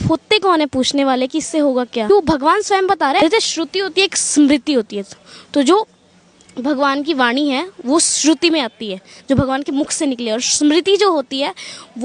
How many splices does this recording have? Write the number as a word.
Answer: two